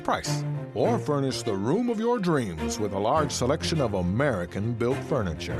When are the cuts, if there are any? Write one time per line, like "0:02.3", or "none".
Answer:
0:03.0